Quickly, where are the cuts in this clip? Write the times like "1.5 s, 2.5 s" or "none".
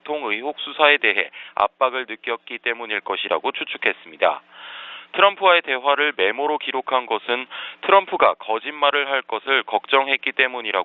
5.7 s